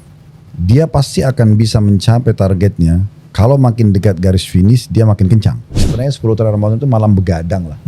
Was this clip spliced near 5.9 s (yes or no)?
yes